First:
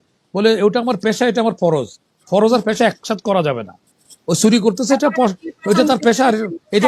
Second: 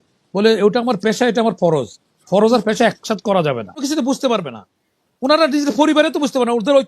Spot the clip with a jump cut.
second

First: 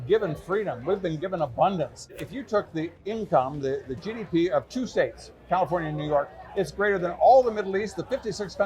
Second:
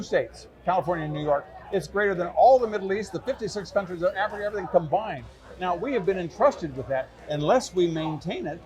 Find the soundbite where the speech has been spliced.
first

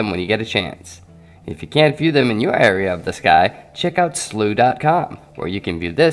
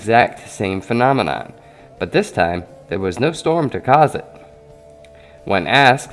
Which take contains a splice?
first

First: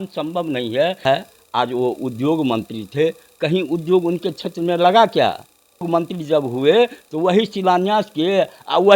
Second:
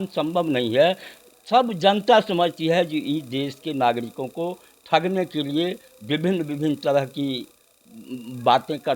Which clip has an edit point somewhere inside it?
first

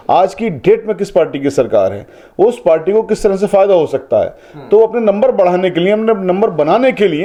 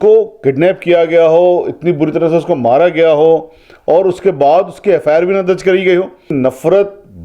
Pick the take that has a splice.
second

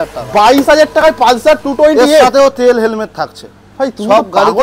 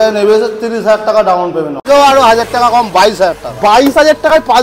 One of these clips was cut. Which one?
second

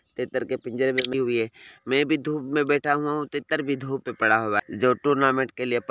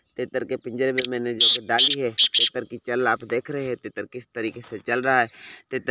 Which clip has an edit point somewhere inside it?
first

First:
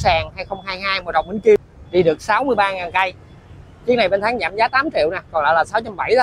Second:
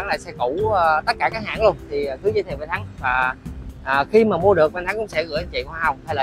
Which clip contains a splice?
first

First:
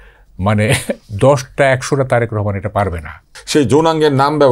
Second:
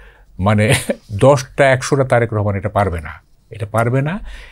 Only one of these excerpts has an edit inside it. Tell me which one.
first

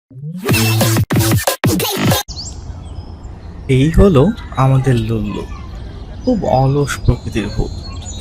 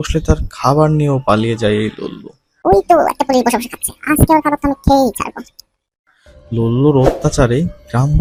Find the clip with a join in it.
first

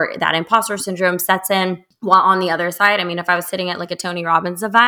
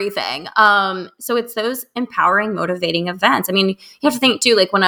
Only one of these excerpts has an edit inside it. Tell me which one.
first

